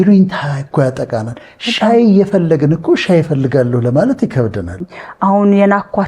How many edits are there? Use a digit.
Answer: 1